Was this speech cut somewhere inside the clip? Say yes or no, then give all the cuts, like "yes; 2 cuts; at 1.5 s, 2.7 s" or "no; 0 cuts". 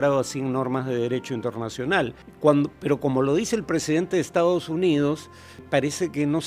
yes; 2 cuts; at 2.2 s, 5.6 s